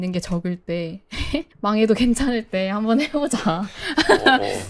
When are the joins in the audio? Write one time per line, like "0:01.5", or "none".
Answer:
none